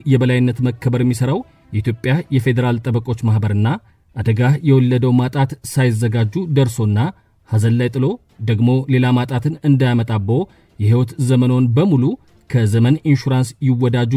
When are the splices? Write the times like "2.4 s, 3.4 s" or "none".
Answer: none